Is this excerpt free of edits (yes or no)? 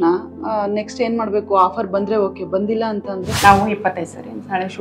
no